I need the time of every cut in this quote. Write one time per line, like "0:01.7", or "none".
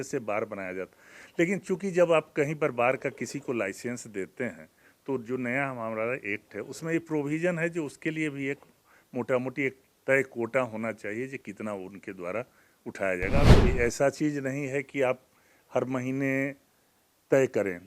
0:13.5

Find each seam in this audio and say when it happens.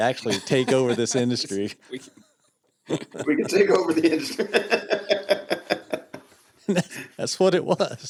none

